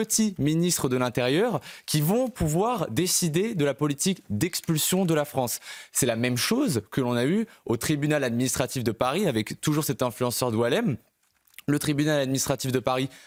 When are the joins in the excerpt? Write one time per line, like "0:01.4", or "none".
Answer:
none